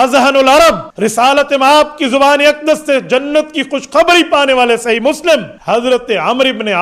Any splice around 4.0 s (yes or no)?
no